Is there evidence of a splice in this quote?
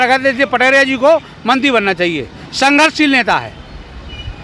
no; 0 cuts

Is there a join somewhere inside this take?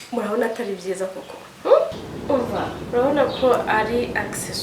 yes; 1 cut; at 2.1 s

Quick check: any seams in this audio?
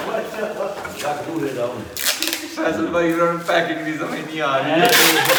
no; 0 cuts

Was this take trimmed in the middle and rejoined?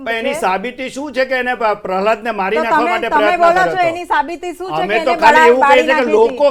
no; 0 cuts

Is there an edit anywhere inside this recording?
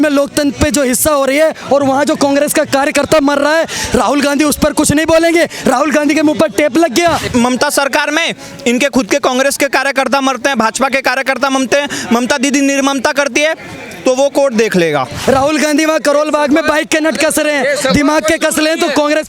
yes; 2 cuts; at 7.2 s, 15.1 s

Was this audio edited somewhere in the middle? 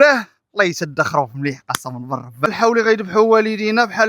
yes; 1 cut; at 2.5 s

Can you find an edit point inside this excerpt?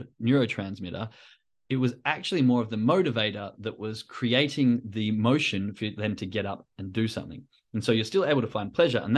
no; 0 cuts

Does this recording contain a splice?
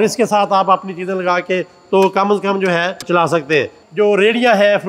yes; 2 cuts; at 3.1 s, 3.8 s

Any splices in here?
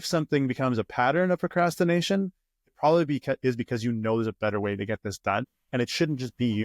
yes; 1 cut; at 5.4 s

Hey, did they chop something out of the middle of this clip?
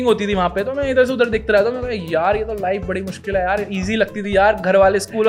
no; 0 cuts

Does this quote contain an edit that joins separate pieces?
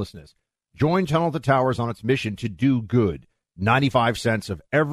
no; 0 cuts

